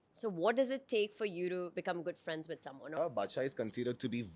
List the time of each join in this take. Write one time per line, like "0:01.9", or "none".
0:02.9